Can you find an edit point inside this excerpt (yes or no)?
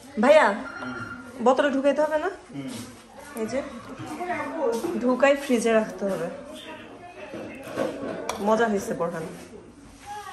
no